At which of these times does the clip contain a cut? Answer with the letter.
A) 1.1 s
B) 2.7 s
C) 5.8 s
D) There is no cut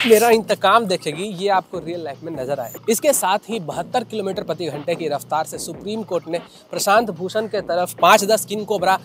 B